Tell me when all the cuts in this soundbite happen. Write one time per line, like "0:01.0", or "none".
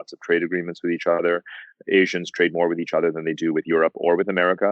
0:01.2